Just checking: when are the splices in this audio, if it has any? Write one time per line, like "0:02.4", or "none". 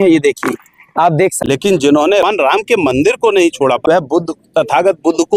0:01.4
0:02.2
0:03.8